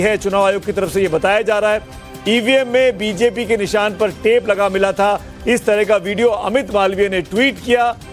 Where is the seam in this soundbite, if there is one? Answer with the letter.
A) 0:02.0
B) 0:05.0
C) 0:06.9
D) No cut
D